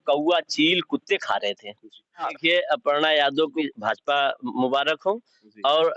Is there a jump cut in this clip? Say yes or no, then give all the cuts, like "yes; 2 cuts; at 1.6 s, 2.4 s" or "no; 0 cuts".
yes; 2 cuts; at 2.3 s, 3.5 s